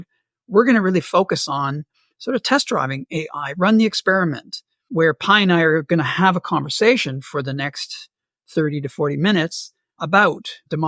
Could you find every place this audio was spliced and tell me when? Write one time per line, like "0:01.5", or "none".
none